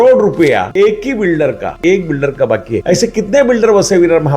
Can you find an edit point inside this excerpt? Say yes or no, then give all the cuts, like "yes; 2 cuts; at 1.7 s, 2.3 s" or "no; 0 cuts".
yes; 1 cut; at 1.7 s